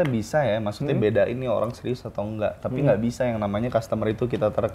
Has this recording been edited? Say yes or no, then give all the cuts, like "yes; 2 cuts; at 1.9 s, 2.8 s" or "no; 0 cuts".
no; 0 cuts